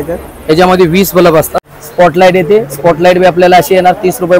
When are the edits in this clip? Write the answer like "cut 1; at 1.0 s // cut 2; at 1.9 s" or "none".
cut 1; at 1.6 s